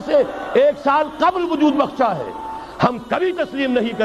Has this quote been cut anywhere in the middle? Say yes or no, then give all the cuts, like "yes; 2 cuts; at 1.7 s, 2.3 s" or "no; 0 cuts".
no; 0 cuts